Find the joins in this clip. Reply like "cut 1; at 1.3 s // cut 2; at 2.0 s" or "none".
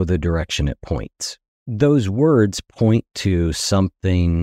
cut 1; at 1.7 s